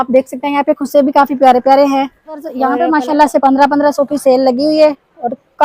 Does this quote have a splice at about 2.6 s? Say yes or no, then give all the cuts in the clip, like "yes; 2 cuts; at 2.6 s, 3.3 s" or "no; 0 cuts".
yes; 1 cut; at 2.6 s